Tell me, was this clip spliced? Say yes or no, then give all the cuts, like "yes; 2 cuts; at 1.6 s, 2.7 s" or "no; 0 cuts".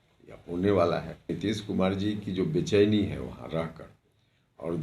yes; 1 cut; at 1.3 s